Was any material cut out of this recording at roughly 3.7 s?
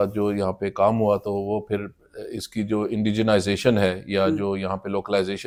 no; 0 cuts

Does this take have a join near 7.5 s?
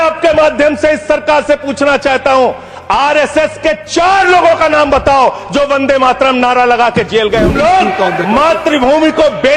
yes; 1 cut; at 7.5 s

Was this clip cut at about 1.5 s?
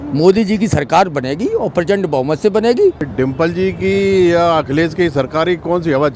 no; 1 cut; at 3.0 s

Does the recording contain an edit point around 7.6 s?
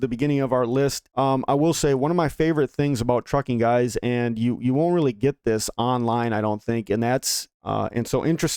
yes; 2 cuts; at 1.1 s, 7.6 s

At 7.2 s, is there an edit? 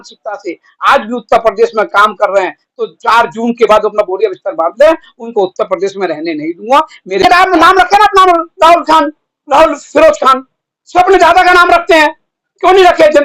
yes; 1 cut; at 7.2 s

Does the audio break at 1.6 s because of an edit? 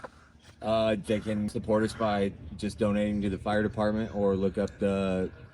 yes; 1 cut; at 1.6 s

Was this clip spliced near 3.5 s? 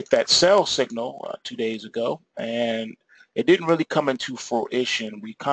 yes; 1 cut; at 3.5 s

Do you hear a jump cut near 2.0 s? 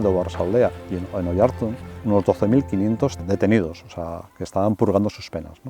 yes; 1 cut; at 2.0 s

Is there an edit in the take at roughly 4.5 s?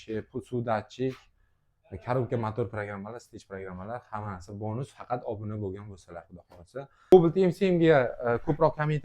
no; 1 cut; at 7.1 s

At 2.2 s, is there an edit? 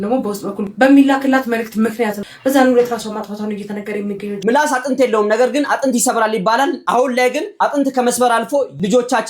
yes; 2 cuts; at 2.2 s, 4.4 s

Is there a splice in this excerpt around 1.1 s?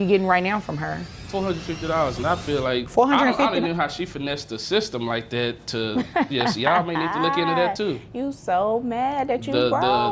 yes; 2 cuts; at 1.1 s, 2.9 s

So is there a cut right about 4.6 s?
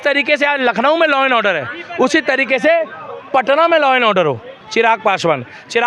yes; 1 cut; at 4.6 s

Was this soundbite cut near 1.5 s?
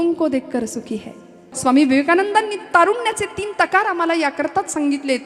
yes; 1 cut; at 1.5 s

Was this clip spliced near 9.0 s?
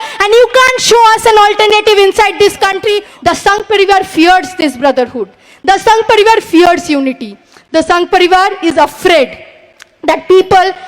no; 1 cut; at 3.1 s

